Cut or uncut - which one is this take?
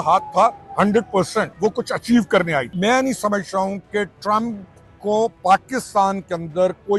cut